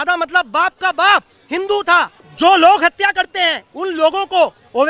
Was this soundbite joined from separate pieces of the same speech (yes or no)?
yes